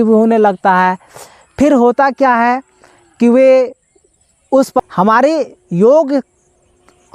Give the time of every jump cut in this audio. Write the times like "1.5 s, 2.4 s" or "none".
4.8 s

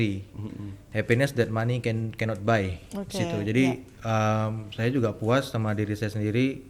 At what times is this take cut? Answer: none

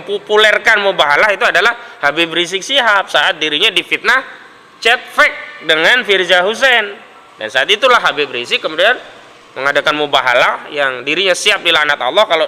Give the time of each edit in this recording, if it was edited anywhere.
none

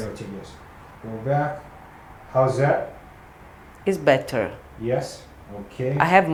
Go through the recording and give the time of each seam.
none

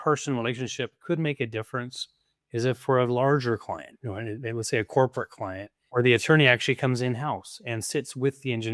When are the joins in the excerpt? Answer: 1.0 s, 5.8 s

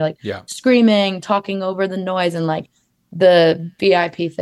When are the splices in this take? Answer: none

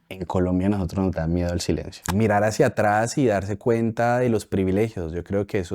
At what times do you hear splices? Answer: 2.0 s

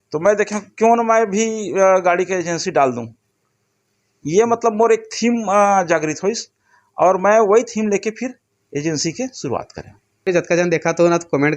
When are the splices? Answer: 10.3 s

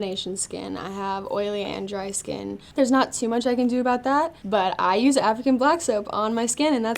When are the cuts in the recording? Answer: 2.6 s, 4.3 s

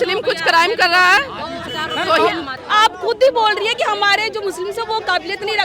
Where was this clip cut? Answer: 2.5 s

